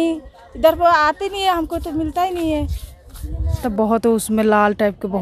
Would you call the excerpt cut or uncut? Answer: cut